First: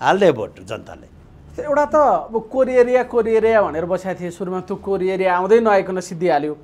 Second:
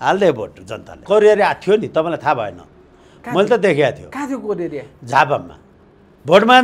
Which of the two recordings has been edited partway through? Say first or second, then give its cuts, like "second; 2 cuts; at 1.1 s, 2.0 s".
second; 1 cut; at 1.0 s